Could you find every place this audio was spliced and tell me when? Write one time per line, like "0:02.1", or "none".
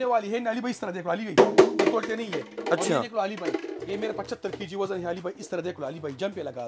none